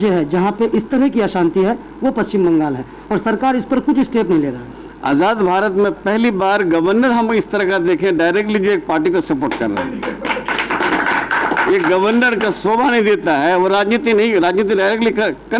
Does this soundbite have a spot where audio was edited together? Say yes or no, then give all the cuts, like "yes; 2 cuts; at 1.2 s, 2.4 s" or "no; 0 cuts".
no; 0 cuts